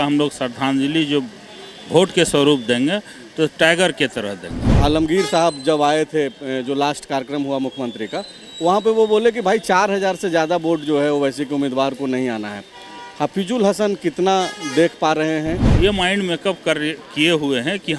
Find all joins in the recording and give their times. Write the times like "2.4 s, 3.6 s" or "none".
4.7 s, 15.7 s